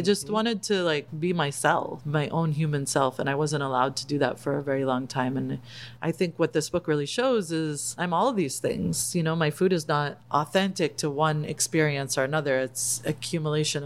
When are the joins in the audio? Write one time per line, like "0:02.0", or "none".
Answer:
0:01.1
0:02.0
0:07.9
0:10.2

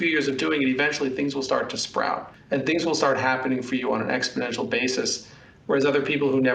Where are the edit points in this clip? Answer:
0:02.3

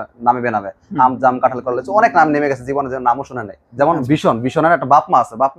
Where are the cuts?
0:03.6

